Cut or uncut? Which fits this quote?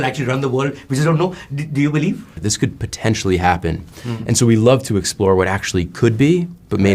cut